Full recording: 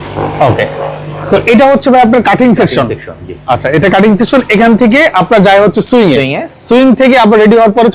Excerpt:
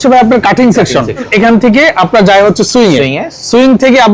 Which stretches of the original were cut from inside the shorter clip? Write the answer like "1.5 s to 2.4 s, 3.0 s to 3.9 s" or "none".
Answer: 3.1 s to 4.5 s

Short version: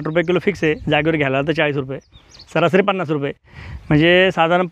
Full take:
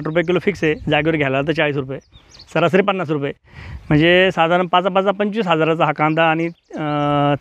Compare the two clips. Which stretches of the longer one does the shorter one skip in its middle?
none

